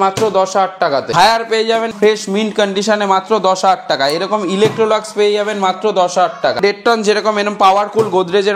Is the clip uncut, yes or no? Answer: no